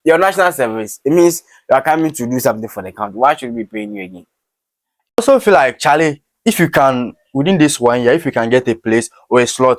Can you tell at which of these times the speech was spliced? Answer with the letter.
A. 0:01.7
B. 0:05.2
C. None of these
B